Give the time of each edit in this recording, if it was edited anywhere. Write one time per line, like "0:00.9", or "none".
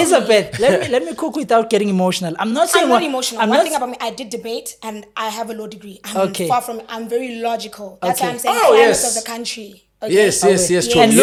none